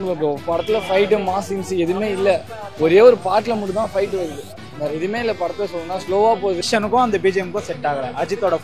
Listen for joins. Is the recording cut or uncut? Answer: cut